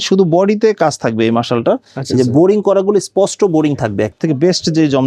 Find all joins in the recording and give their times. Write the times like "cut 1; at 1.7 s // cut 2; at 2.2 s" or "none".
cut 1; at 4.1 s